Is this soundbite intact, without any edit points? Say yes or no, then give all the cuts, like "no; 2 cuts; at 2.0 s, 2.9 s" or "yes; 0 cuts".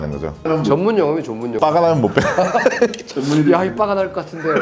yes; 0 cuts